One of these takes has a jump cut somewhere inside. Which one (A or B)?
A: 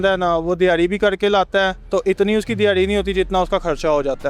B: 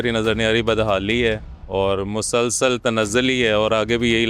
A